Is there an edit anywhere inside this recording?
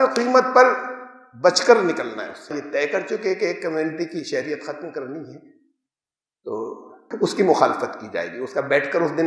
yes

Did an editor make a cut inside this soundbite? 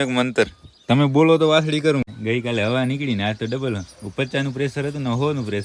yes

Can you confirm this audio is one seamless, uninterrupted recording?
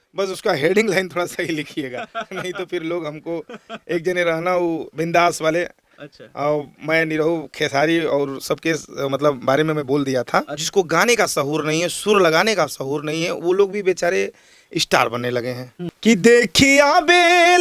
no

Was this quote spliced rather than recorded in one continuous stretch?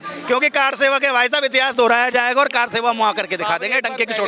no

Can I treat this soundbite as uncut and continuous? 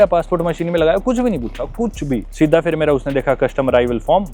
yes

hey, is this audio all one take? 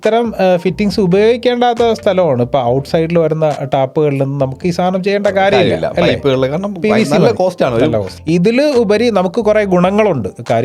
no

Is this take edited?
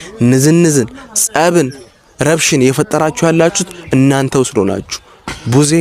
no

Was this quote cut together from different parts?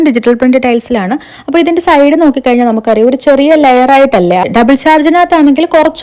yes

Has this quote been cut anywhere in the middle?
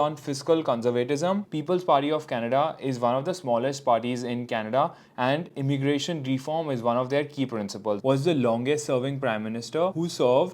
yes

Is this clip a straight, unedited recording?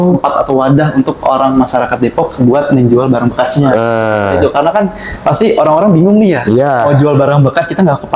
yes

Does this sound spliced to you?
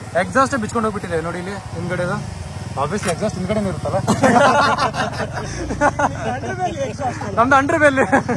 no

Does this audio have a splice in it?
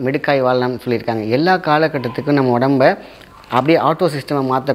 no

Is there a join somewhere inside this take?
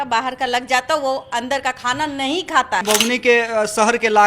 yes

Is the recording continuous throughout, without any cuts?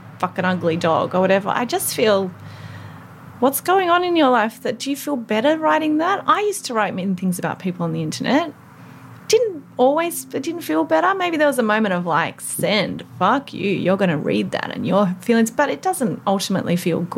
yes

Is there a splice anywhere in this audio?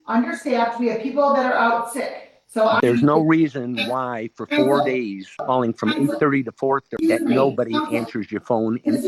yes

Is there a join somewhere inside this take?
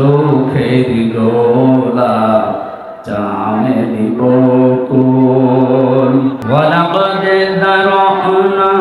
yes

